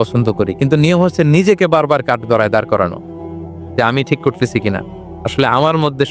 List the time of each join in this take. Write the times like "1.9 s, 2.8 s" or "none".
none